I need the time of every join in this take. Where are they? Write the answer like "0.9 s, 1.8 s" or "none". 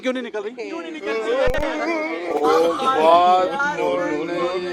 2.3 s